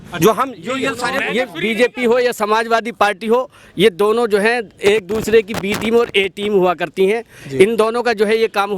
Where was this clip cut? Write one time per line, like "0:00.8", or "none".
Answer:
0:01.2

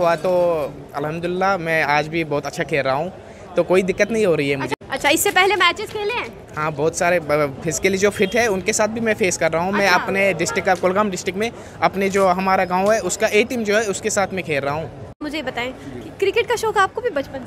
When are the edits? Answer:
0:04.7
0:15.2

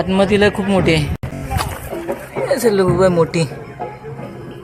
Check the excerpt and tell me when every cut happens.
0:01.2

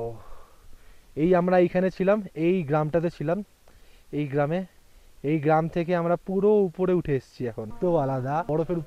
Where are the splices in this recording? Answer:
0:07.7

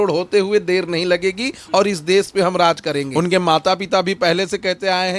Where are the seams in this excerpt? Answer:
0:03.1

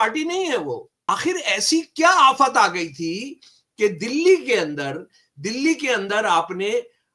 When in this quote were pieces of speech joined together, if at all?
0:01.1

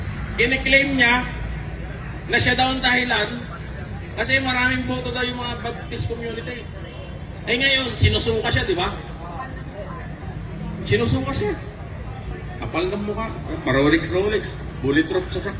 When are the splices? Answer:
none

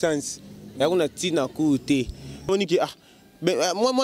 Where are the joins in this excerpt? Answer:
0:02.5

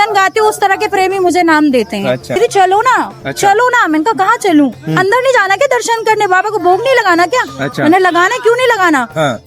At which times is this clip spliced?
0:02.4

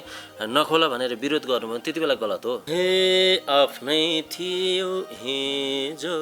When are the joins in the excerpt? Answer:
0:02.6

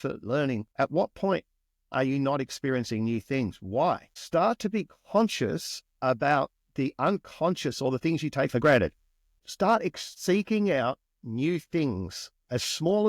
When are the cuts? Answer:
0:04.1
0:09.3
0:10.1

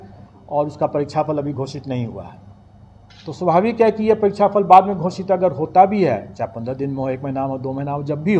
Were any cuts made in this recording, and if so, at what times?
none

